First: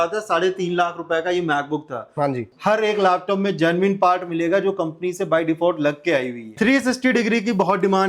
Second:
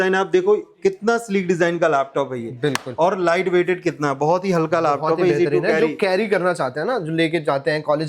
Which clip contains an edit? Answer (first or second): first